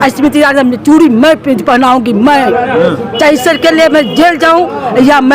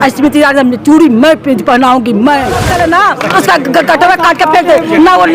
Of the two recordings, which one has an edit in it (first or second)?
second